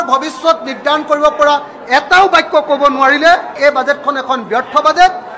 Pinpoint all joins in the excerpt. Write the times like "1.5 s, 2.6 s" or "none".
3.6 s